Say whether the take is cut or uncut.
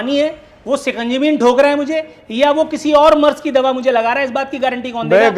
uncut